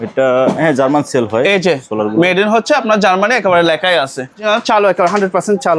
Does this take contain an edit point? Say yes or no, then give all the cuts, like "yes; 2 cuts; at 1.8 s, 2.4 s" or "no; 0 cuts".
yes; 1 cut; at 4.4 s